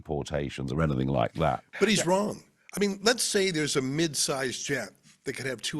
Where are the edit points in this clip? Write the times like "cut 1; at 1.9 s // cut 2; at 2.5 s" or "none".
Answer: cut 1; at 1.7 s